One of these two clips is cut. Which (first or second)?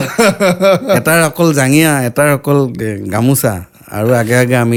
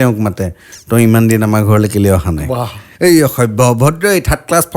second